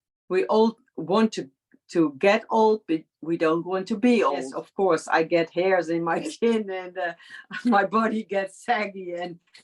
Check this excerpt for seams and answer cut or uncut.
cut